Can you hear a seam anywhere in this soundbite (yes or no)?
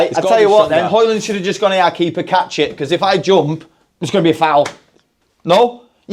no